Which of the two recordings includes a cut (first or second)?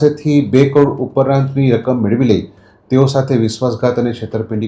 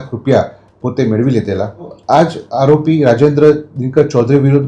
second